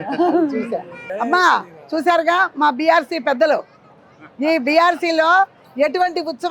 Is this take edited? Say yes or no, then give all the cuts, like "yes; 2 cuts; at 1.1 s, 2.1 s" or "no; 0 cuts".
yes; 1 cut; at 1.1 s